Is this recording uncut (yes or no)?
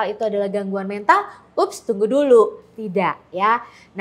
yes